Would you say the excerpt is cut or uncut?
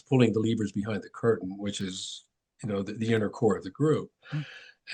uncut